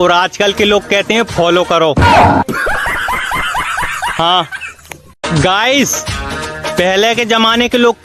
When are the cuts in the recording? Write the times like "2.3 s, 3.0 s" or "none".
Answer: none